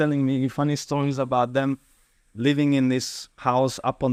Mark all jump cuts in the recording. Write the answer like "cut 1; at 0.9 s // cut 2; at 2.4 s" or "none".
none